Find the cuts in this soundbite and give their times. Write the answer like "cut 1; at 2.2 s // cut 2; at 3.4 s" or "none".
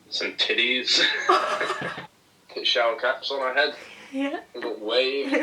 cut 1; at 2.0 s